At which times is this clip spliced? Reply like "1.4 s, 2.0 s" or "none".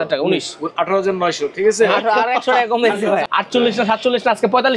3.2 s